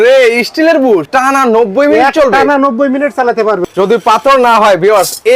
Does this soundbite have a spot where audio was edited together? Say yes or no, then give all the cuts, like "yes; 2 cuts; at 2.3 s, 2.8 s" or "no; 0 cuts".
yes; 2 cuts; at 1.1 s, 3.6 s